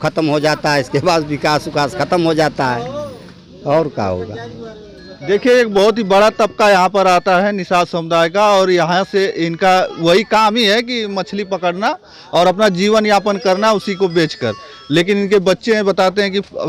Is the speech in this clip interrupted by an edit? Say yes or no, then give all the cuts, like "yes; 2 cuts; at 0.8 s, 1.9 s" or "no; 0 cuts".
no; 0 cuts